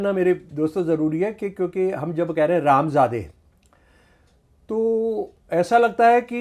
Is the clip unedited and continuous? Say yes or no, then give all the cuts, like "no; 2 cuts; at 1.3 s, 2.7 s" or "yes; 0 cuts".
yes; 0 cuts